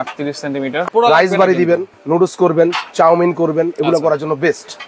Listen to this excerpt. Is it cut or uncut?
cut